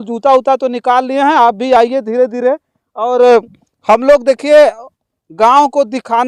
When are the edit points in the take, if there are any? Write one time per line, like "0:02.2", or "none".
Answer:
none